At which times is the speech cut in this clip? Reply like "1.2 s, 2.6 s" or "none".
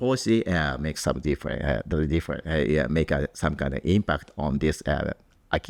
none